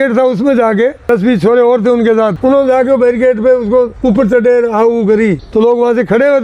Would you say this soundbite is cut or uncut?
cut